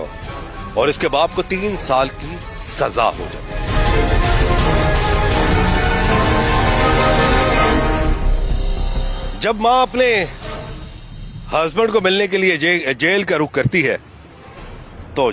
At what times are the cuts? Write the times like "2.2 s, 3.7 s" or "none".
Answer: none